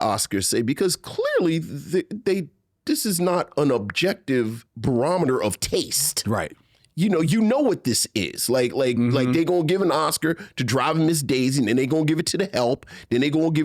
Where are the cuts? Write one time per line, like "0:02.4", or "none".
0:04.7